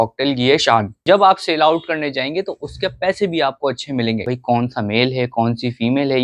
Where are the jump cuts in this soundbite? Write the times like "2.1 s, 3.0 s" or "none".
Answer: 0.9 s, 4.3 s